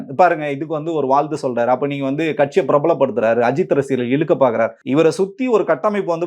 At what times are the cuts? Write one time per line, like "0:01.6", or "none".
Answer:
0:04.8